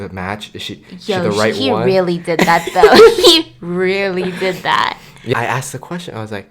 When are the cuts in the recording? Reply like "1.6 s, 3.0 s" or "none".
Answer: 5.3 s